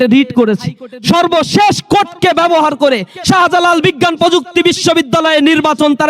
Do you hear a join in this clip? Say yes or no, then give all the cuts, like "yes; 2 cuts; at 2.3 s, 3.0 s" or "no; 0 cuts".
no; 0 cuts